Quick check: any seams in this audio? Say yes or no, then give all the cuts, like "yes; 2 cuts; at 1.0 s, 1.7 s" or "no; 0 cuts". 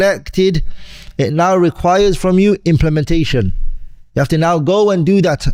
no; 0 cuts